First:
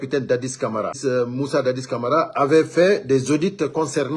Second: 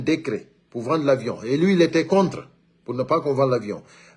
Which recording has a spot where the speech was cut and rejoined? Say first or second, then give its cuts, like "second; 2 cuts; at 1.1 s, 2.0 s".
first; 1 cut; at 1.0 s